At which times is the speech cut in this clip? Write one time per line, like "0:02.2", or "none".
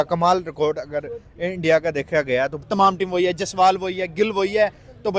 0:02.7

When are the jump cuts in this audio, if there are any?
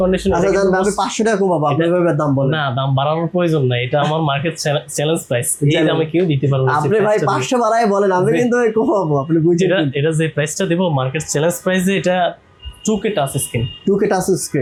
none

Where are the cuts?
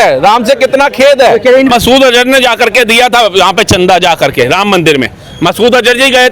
0:01.7

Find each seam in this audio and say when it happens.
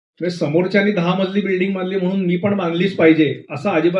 none

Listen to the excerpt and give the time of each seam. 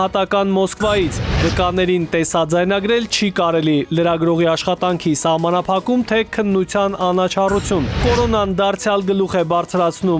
none

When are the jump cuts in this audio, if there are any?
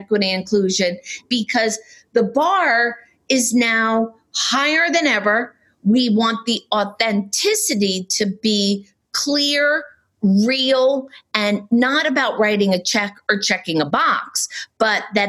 0:01.3

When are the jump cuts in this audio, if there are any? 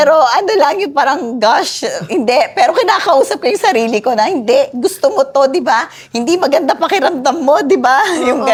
none

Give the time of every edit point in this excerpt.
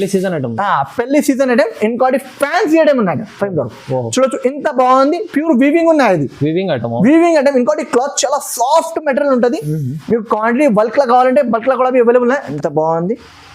0:12.5

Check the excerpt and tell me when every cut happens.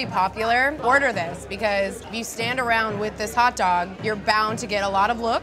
0:00.8
0:02.1
0:03.9

